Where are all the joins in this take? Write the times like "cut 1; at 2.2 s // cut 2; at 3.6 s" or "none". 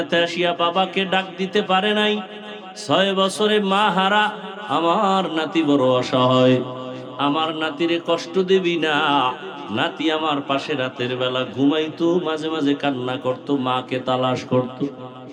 none